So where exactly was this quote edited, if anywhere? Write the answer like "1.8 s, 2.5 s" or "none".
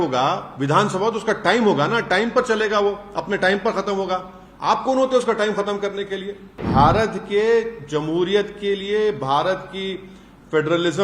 6.6 s